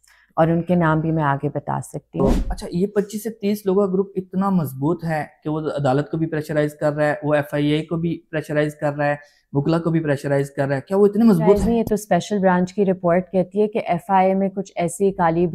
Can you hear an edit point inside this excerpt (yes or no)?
yes